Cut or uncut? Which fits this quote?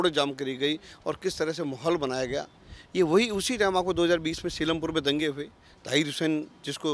uncut